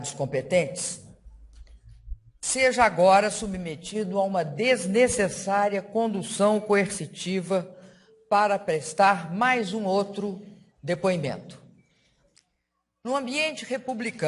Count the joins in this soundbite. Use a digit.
1